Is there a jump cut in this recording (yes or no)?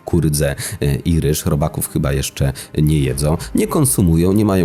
no